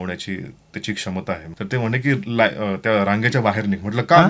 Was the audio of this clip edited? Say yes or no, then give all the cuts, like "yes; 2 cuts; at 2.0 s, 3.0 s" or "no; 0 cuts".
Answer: yes; 1 cut; at 1.5 s